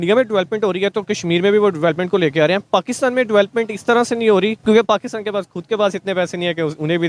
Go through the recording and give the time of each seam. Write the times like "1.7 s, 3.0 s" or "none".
4.6 s